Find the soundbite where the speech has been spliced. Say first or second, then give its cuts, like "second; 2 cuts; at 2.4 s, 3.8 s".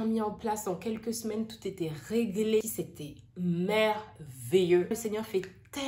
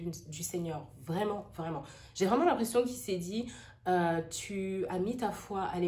first; 2 cuts; at 2.6 s, 4.9 s